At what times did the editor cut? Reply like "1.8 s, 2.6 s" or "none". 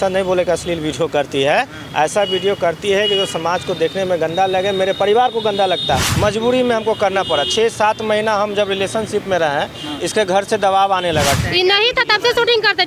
6.1 s, 11.4 s